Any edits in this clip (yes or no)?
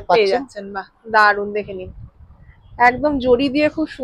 no